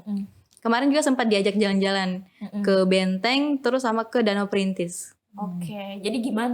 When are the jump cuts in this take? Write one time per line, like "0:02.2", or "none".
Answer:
none